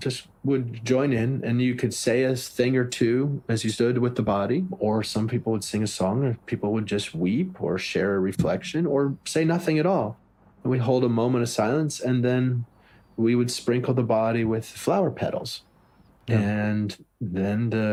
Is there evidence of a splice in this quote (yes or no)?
no